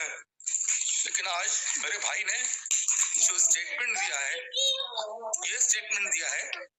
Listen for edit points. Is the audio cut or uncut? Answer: uncut